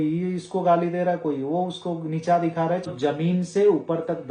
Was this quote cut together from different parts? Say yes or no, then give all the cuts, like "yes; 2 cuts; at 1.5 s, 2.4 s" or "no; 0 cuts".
yes; 1 cut; at 2.8 s